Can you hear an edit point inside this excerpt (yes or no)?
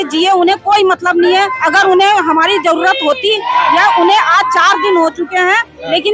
no